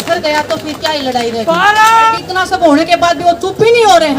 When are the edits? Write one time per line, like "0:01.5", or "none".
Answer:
0:02.2